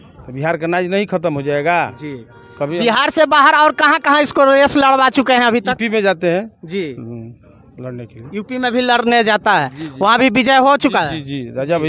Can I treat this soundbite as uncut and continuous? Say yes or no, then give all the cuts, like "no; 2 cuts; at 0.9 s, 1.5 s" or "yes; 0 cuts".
yes; 0 cuts